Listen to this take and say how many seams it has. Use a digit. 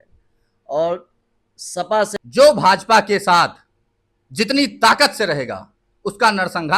1